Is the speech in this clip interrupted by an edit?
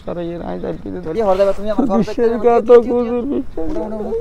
yes; 1 cut; at 1.1 s

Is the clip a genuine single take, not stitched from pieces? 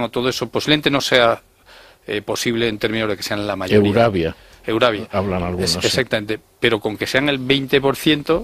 yes; 0 cuts

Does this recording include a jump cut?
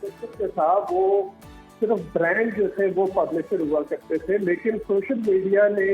no; 0 cuts

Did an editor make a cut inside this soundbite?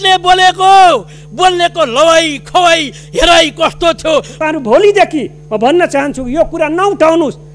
yes; 1 cut; at 4.4 s

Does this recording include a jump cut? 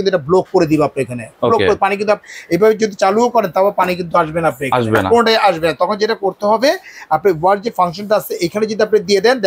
no; 0 cuts

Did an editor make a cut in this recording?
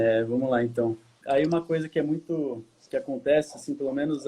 yes; 1 cut; at 1.1 s

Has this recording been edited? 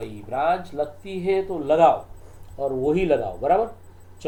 no; 0 cuts

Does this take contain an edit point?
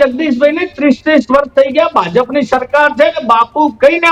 no; 0 cuts

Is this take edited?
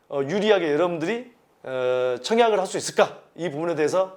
no; 0 cuts

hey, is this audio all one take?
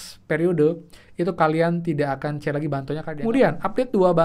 no; 1 cut; at 3.1 s

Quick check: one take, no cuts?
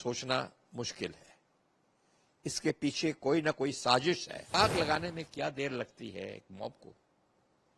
no; 1 cut; at 4.5 s

